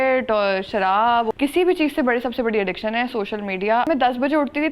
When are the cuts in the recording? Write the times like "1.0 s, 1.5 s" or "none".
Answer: 1.3 s, 3.9 s